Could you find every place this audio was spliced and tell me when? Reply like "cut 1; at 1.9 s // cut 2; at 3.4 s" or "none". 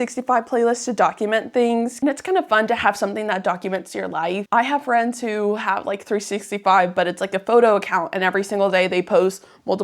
cut 1; at 1.9 s // cut 2; at 4.4 s